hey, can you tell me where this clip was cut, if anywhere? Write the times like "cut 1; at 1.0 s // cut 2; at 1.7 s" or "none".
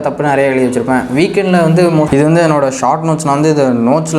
cut 1; at 2.1 s